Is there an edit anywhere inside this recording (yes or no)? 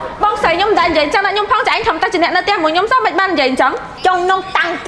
yes